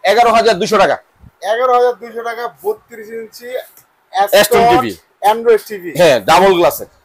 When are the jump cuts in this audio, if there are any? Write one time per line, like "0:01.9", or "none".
none